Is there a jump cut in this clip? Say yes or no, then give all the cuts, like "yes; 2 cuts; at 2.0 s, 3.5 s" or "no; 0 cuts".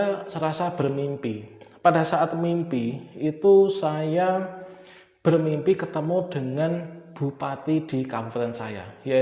no; 0 cuts